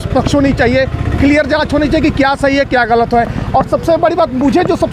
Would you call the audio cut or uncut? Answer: uncut